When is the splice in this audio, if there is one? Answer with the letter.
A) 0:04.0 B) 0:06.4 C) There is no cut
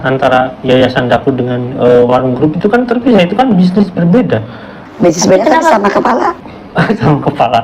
C